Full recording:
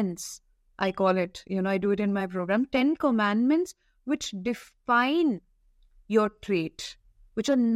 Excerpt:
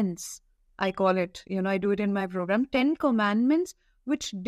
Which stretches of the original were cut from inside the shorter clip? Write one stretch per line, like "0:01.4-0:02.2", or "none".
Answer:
none